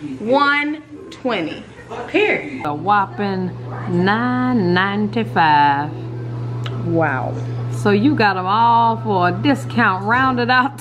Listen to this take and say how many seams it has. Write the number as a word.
one